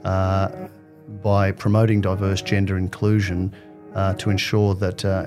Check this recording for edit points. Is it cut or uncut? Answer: uncut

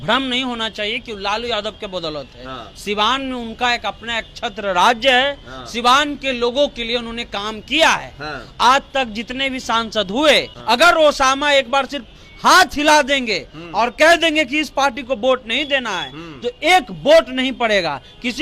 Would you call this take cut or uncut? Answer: cut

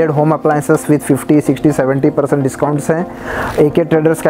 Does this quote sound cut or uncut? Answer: uncut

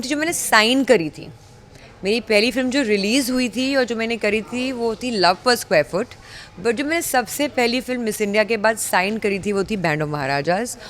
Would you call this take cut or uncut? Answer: uncut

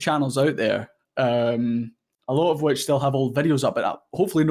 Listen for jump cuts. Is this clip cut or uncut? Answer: uncut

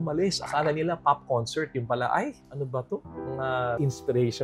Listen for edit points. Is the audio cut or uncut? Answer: uncut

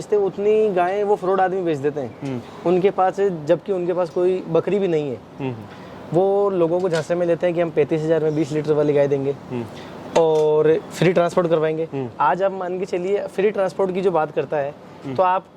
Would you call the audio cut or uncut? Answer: uncut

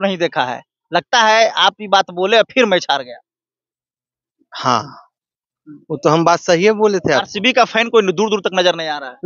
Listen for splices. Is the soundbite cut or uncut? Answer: uncut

